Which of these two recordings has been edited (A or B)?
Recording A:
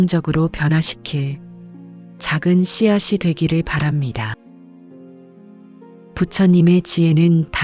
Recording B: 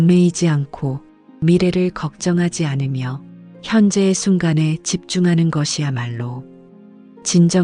A